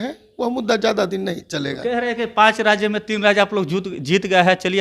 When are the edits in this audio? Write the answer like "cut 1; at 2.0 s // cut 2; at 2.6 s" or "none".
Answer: none